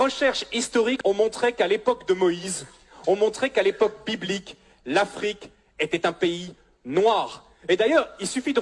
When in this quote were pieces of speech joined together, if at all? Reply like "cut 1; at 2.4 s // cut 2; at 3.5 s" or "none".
cut 1; at 1.0 s